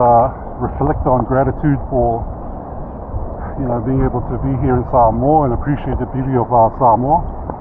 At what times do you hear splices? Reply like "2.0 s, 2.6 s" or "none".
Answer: none